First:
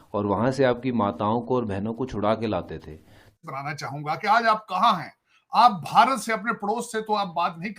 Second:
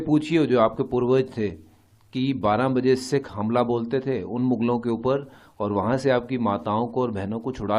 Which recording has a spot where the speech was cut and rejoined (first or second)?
first